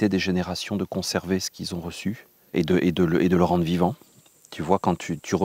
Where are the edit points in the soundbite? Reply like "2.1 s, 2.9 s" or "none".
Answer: 2.3 s

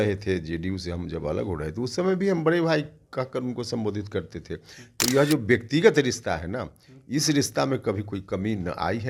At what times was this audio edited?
none

